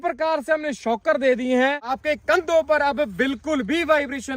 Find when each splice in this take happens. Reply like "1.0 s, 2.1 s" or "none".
2.0 s